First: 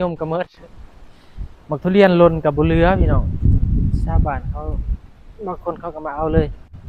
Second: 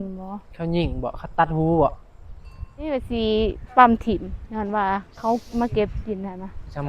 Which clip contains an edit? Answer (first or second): second